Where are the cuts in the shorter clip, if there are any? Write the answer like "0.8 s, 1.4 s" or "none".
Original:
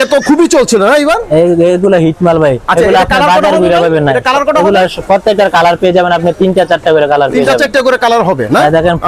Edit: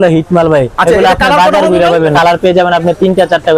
2.1 s